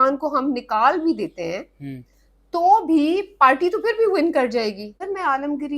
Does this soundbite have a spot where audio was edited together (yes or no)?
yes